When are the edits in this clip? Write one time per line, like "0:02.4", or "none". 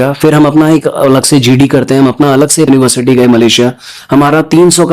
0:02.7

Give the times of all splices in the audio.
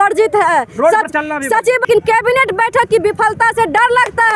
0:01.9

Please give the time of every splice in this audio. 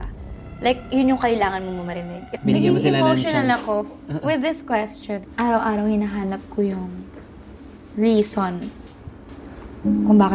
0:02.3
0:05.2

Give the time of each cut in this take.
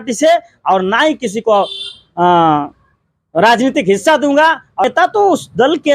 0:04.8

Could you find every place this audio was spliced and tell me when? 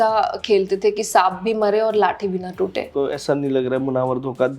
0:02.9

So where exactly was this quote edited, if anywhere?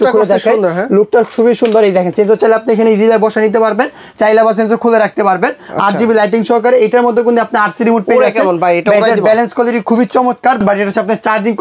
none

